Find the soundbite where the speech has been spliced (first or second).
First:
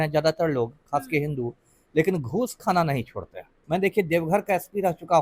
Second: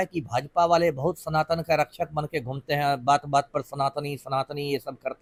first